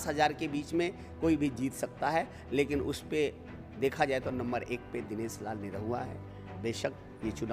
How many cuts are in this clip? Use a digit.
1